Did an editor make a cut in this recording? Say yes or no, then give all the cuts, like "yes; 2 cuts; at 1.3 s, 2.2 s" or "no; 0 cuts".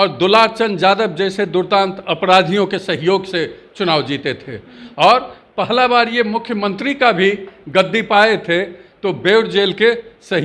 no; 0 cuts